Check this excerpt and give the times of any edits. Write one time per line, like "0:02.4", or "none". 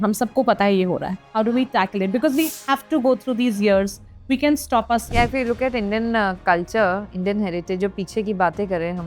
0:01.2
0:05.0